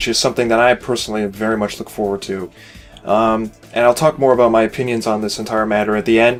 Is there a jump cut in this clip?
no; 0 cuts

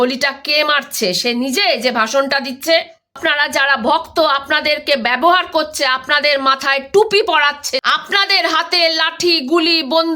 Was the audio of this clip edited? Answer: yes; 2 cuts; at 3.1 s, 7.8 s

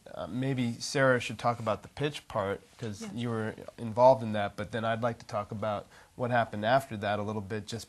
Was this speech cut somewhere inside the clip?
no; 0 cuts

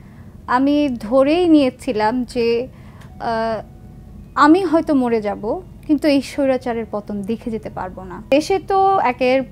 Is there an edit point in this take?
yes; 1 cut; at 8.3 s

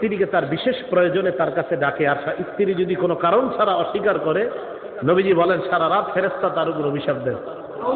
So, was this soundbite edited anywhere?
no; 0 cuts

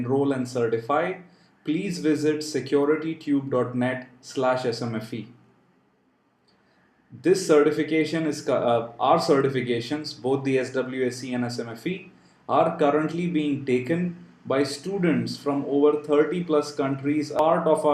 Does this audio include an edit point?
yes; 1 cut; at 15.3 s

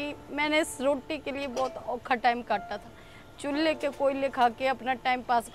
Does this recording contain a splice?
no; 0 cuts

